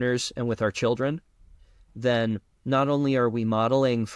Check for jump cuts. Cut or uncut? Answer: uncut